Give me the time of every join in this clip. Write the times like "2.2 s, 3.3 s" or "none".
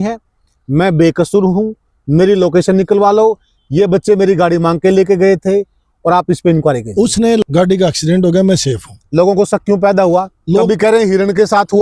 7.4 s